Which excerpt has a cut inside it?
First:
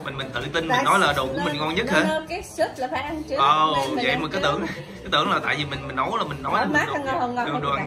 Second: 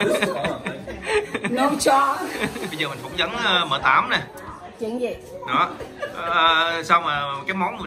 second; 1 cut; at 2.7 s

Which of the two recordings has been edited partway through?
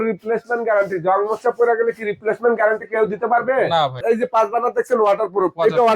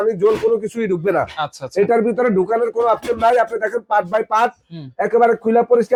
first; 1 cut; at 4.0 s

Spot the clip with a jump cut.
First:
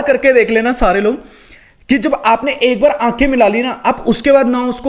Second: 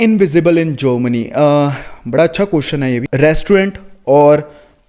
second; 1 cut; at 3.1 s

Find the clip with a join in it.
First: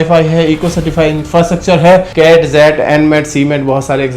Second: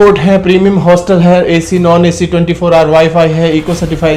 first; 1 cut; at 2.1 s

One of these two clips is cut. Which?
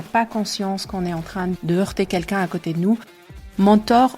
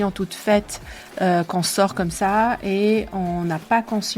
first; 2 cuts; at 1.6 s, 3.2 s

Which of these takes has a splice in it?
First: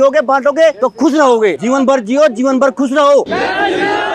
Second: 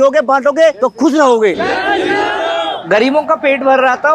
second; 2 cuts; at 1.6 s, 2.8 s

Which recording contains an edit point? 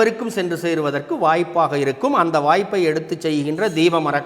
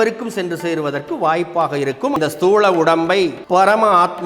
second; 2 cuts; at 2.2 s, 3.4 s

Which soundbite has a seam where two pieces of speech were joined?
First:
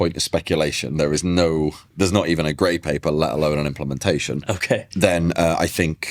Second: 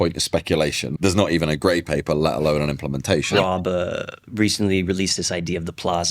second; 2 cuts; at 0.9 s, 3.3 s

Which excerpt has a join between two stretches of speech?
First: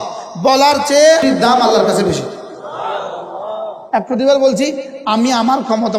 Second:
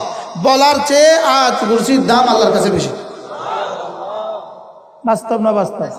first; 2 cuts; at 1.2 s, 3.8 s

